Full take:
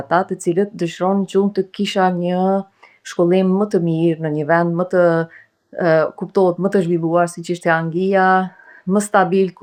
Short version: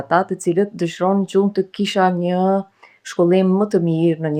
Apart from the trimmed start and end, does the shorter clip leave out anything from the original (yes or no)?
no